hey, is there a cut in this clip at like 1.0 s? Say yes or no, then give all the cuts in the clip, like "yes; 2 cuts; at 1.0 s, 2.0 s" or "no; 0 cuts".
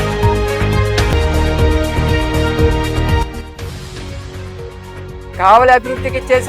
yes; 1 cut; at 1.0 s